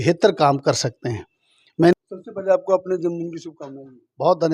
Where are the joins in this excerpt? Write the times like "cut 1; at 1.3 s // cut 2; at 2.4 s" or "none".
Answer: cut 1; at 1.9 s